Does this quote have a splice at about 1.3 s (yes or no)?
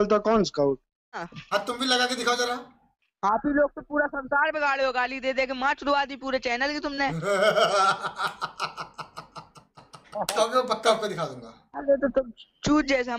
yes